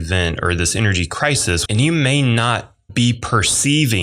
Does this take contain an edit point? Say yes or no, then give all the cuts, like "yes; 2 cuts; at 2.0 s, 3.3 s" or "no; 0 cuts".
yes; 2 cuts; at 1.6 s, 2.8 s